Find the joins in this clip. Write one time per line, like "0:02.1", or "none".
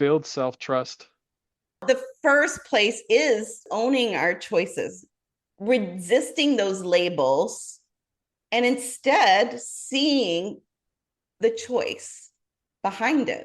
0:01.8
0:03.6

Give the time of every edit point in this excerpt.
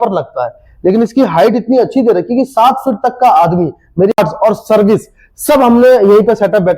0:04.1

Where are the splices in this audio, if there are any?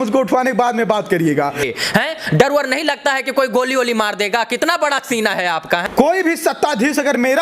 0:01.6
0:05.9

